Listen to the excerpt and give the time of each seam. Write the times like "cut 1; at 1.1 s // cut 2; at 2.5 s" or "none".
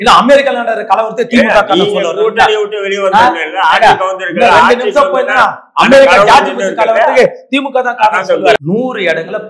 cut 1; at 8.6 s